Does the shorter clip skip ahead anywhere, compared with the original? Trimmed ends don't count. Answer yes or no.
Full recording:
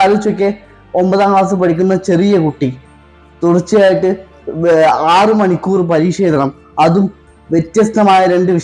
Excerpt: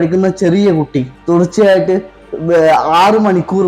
yes